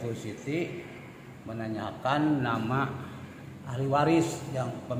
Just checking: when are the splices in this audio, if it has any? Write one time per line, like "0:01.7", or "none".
none